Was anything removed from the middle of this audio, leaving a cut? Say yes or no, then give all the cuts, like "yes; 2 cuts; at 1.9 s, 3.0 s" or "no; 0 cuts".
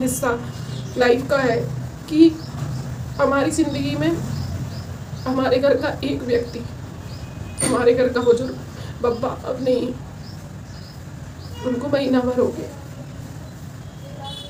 no; 0 cuts